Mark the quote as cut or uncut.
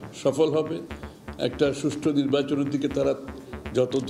uncut